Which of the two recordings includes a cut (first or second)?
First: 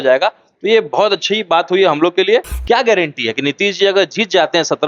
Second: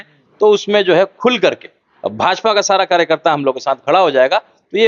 first